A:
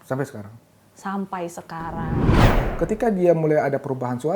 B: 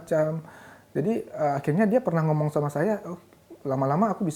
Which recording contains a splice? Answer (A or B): A